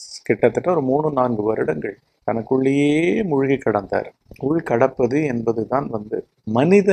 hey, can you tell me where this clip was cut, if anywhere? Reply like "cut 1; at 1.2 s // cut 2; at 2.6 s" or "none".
cut 1; at 4.1 s